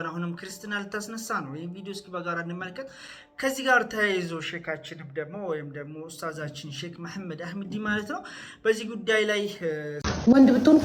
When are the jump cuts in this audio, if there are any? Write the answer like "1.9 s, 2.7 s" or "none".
none